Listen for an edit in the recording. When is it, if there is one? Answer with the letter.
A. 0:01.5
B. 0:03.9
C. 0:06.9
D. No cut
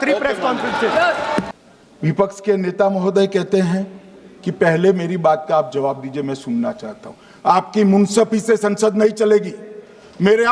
A